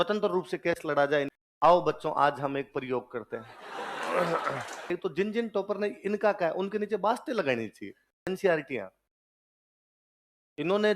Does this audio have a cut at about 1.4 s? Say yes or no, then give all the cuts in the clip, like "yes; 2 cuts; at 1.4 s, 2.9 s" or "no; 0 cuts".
yes; 3 cuts; at 1.4 s, 4.9 s, 8.3 s